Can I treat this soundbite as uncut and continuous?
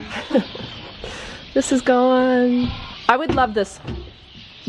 no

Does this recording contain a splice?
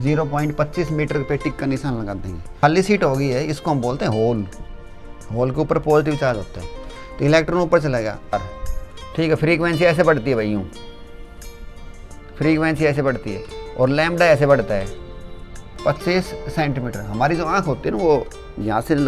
yes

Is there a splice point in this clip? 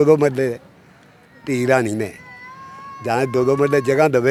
no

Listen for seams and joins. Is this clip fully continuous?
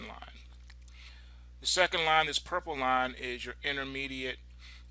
yes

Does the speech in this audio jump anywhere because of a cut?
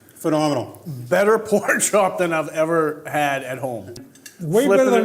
yes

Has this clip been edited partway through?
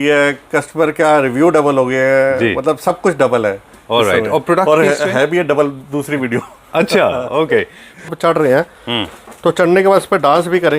yes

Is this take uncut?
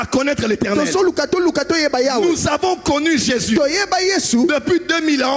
yes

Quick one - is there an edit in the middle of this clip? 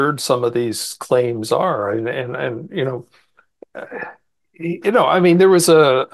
no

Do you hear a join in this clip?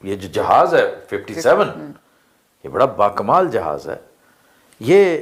no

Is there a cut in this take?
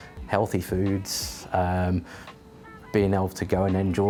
no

